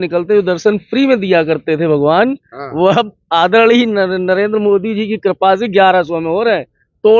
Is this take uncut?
yes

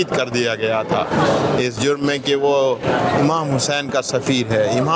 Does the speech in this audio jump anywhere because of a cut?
no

